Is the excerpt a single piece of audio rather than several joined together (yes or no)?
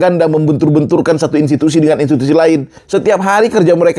no